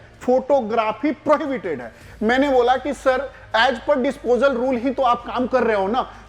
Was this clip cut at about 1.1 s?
no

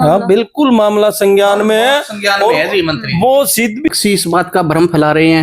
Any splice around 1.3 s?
no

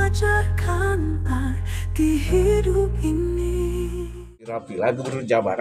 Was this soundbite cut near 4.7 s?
yes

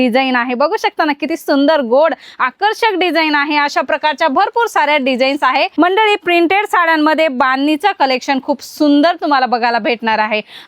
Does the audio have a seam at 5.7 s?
yes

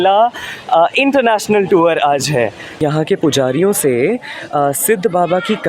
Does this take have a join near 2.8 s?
yes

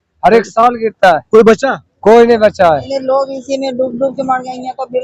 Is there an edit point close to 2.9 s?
yes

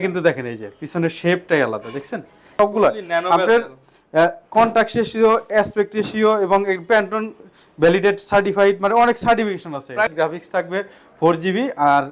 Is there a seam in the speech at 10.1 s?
yes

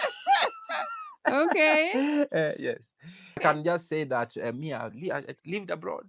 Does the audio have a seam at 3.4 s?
yes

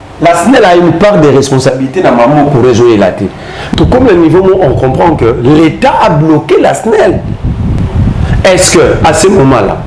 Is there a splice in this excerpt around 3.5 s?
no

